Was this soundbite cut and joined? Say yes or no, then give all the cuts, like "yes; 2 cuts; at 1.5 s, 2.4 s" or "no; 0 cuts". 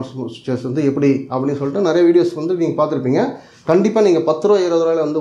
no; 0 cuts